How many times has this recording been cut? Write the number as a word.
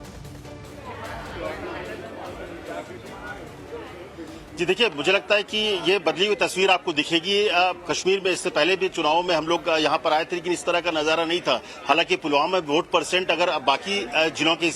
one